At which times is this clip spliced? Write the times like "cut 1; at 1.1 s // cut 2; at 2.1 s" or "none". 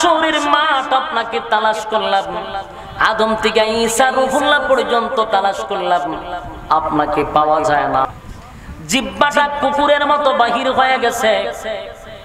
cut 1; at 8.1 s